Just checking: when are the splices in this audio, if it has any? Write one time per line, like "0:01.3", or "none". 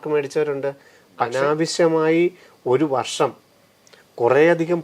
0:01.3